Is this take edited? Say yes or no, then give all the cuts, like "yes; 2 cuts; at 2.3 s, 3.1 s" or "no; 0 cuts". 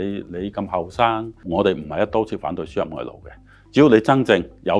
yes; 1 cut; at 1.4 s